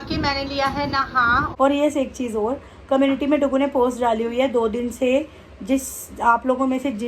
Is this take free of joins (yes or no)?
no